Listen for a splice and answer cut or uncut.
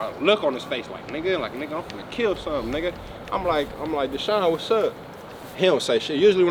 uncut